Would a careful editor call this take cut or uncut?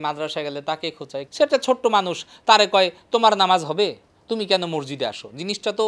cut